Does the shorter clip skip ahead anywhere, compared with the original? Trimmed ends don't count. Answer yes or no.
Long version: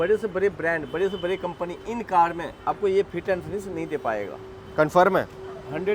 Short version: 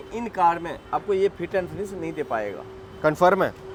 no